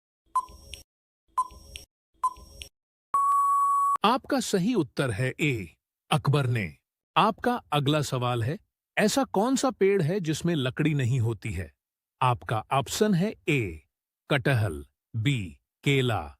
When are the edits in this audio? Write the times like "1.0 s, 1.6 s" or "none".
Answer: 4.0 s